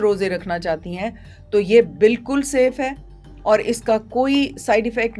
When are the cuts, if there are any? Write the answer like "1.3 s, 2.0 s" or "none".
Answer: none